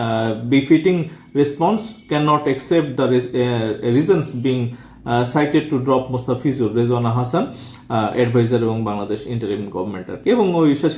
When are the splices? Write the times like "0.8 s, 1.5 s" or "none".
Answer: none

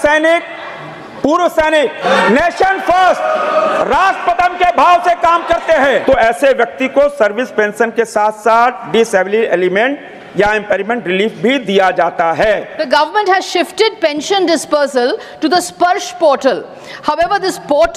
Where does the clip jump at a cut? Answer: 2.0 s, 6.0 s, 12.7 s

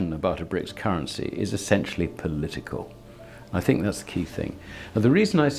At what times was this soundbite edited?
none

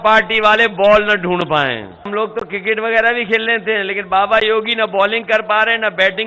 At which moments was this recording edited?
2.1 s

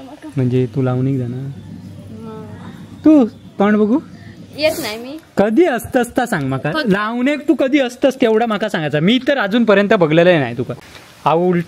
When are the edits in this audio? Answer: 10.7 s

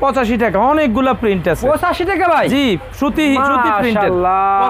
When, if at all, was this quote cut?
none

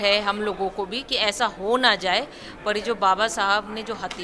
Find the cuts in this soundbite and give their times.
none

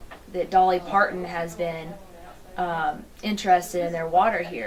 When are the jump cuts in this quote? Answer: 2.6 s

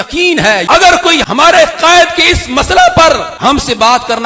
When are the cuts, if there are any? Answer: 1.2 s, 3.3 s

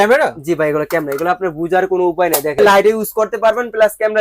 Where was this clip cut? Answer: 2.6 s

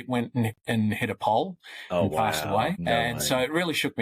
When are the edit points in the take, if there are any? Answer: 2.9 s

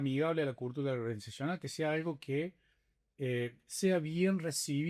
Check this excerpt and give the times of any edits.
none

